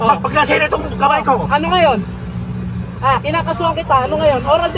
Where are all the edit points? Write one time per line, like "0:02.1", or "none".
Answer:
none